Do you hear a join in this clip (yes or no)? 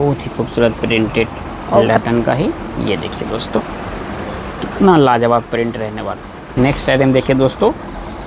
yes